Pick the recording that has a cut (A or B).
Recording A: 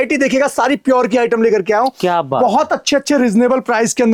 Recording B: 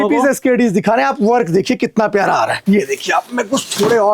B